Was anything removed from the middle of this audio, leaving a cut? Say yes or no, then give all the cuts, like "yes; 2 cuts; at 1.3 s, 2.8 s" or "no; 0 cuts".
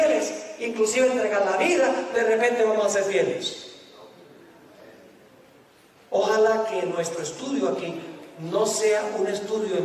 no; 0 cuts